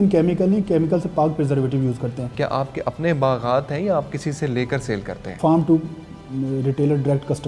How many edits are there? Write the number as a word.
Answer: two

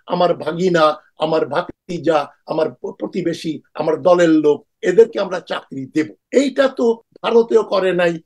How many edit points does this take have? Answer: three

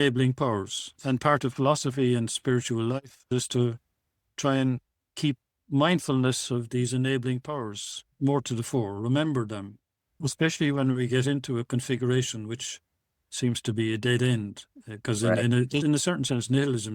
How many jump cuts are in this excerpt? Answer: three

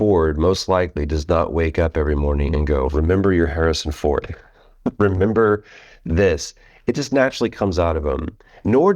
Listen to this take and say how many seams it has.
zero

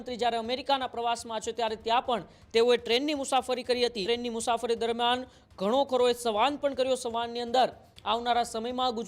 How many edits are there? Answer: one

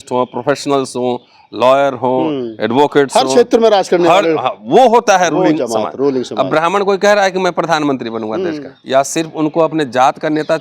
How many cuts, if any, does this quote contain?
one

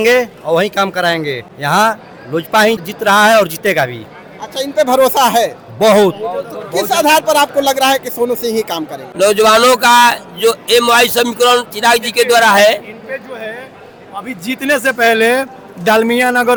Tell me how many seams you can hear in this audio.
zero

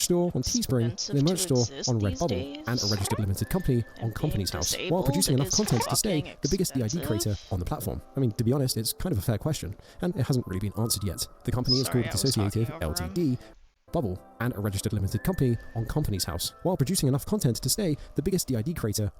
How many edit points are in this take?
zero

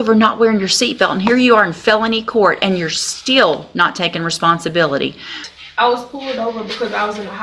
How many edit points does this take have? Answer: one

